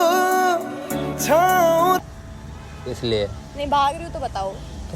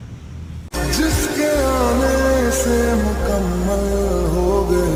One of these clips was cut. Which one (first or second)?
first